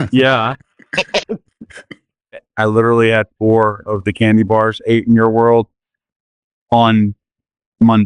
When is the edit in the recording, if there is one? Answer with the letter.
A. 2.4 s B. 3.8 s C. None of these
A